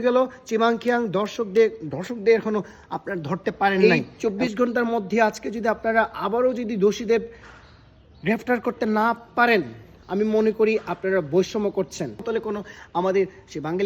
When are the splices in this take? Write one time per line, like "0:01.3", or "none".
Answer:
0:03.8
0:12.2